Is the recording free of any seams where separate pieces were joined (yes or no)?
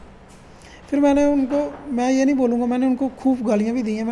yes